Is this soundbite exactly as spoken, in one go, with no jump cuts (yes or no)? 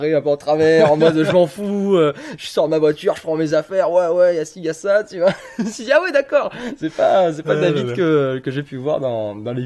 yes